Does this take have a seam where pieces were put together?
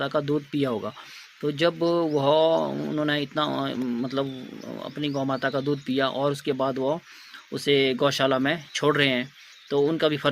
no; 0 cuts

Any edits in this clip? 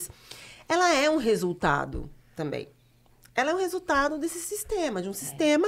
no; 0 cuts

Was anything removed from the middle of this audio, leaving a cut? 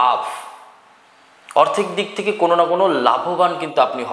no; 0 cuts

